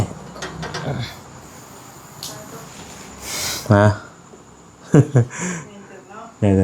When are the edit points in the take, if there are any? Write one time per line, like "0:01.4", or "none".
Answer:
none